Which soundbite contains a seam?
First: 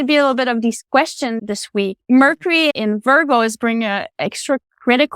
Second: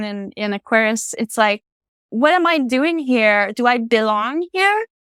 first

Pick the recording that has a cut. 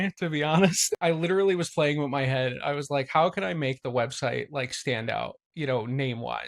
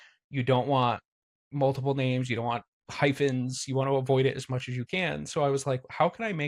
first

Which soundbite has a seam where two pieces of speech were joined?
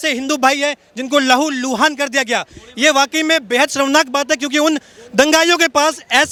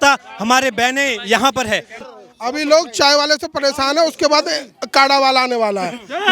second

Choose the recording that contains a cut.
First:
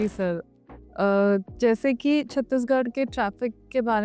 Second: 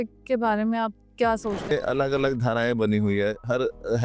second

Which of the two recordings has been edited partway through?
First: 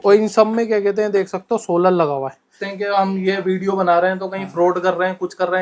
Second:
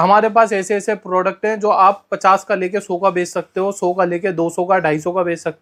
first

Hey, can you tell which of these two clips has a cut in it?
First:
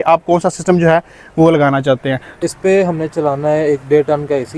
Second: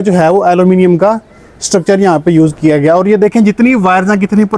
first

